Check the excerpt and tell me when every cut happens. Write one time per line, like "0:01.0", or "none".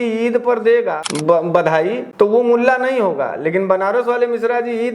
0:01.1
0:02.0